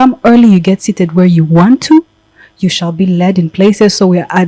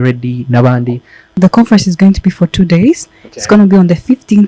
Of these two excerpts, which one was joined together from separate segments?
second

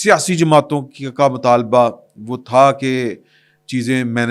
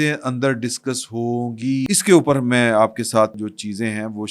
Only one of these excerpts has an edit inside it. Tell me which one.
second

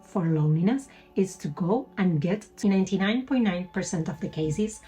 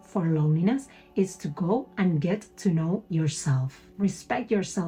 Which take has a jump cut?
first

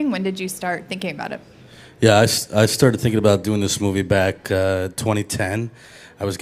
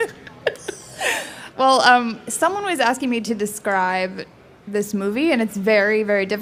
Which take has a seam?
first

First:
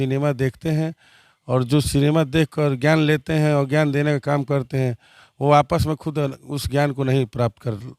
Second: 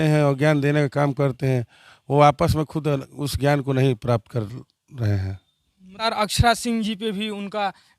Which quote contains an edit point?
second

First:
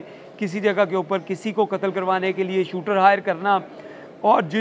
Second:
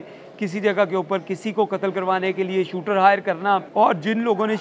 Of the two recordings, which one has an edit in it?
second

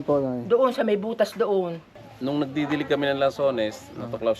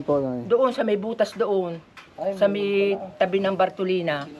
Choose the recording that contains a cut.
first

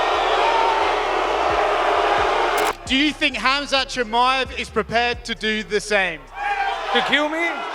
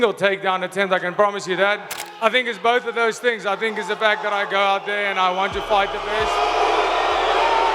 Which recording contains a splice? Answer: second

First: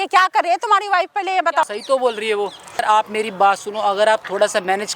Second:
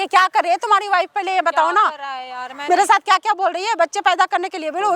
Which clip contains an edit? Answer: first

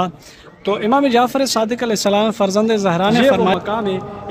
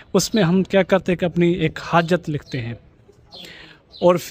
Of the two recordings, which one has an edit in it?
first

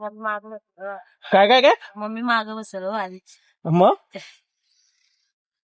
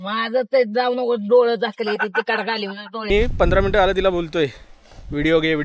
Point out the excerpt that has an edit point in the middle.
second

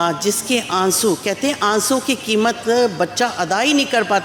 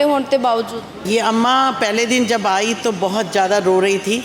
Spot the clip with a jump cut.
second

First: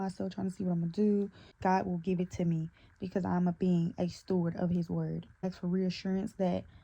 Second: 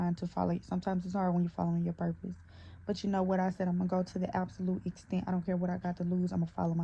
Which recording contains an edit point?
first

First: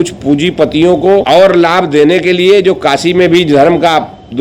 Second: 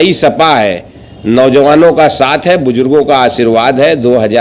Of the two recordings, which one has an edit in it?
first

